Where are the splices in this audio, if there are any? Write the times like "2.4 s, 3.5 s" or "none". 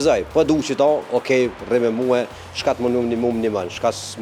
none